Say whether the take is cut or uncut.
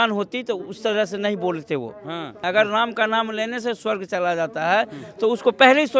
cut